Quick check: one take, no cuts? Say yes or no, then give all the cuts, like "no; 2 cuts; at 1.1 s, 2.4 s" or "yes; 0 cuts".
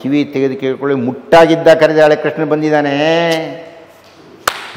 yes; 0 cuts